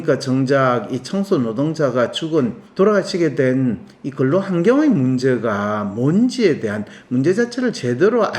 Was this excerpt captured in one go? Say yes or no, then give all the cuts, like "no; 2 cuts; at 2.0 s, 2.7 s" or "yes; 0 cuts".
no; 1 cut; at 2.6 s